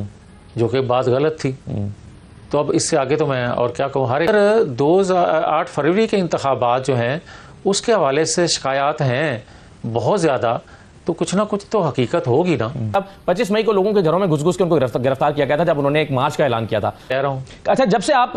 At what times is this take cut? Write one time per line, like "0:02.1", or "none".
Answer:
0:04.3
0:13.0
0:17.0